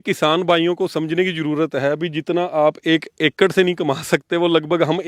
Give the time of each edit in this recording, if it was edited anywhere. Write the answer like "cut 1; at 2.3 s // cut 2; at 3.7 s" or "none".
none